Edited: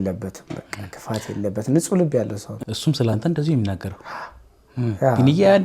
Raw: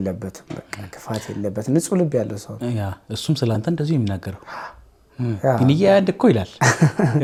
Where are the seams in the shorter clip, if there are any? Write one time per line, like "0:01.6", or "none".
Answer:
0:02.5